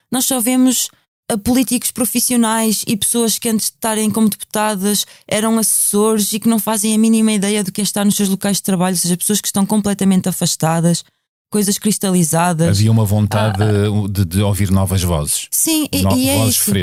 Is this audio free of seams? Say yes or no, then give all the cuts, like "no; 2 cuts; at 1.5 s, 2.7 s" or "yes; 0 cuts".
yes; 0 cuts